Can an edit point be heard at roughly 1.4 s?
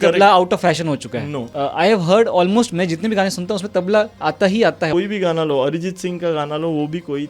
yes; 2 cuts; at 1.4 s, 4.9 s

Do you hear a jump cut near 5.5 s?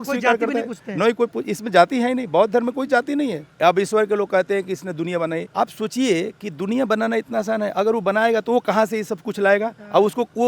yes; 2 cuts; at 3.4 s, 5.5 s

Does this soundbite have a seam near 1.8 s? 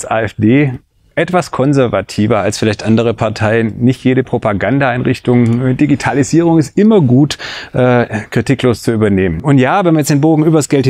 no; 1 cut; at 9.4 s

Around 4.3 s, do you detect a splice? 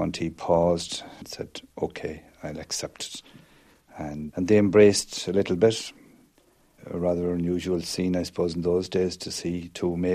yes; 2 cuts; at 1.3 s, 4.3 s

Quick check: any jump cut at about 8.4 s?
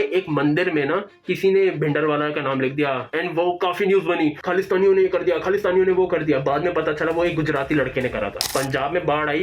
yes; 2 cuts; at 3.1 s, 8.4 s

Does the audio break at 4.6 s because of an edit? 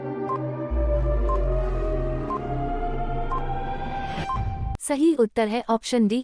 yes; 1 cut; at 4.6 s

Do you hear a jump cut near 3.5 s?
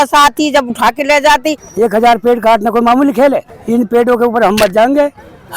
yes; 2 cuts; at 1.6 s, 3.5 s

